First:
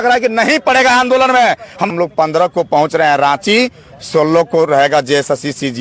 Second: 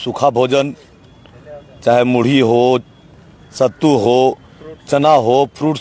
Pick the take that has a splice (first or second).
first